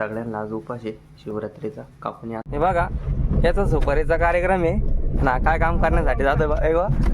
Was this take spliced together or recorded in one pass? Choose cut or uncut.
cut